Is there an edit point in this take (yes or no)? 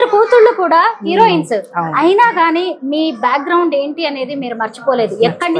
no